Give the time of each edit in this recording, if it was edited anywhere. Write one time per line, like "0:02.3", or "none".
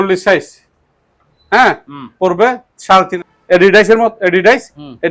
0:03.2